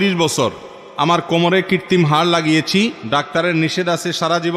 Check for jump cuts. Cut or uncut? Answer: cut